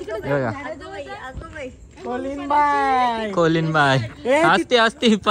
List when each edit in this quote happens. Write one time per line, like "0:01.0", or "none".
none